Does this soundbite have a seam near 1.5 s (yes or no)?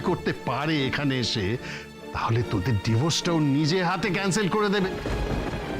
no